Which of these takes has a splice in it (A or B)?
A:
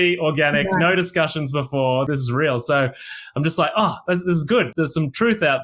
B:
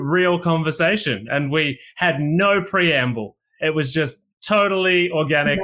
A